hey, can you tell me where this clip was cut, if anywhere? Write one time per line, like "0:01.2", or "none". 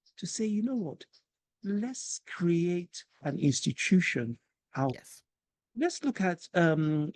0:04.9